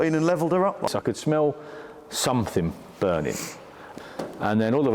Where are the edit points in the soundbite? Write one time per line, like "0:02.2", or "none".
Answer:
0:00.8
0:03.9